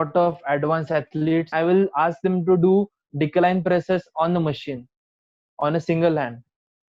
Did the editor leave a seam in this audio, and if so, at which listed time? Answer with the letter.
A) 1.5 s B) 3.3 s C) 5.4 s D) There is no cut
A